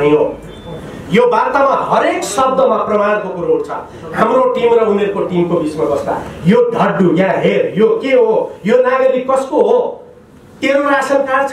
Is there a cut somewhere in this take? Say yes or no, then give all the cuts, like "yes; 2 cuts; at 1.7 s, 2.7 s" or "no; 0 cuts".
no; 0 cuts